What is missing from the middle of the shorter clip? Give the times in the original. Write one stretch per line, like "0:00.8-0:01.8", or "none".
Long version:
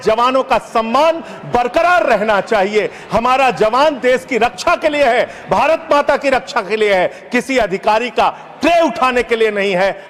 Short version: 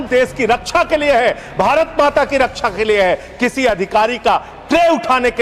none